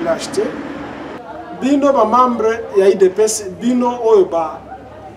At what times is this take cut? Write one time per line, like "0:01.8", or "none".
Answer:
0:01.2